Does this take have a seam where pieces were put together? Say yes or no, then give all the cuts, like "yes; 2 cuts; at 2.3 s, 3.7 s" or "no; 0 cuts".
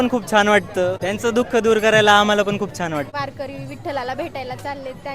yes; 2 cuts; at 1.0 s, 3.1 s